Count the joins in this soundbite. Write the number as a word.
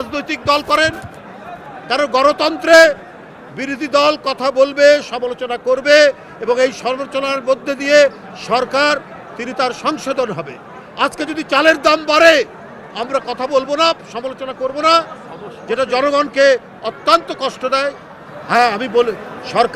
zero